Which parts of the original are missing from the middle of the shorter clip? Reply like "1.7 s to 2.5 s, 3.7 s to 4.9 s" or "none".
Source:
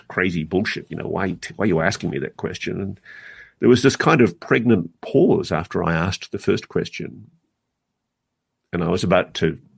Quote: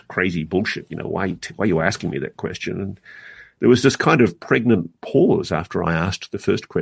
none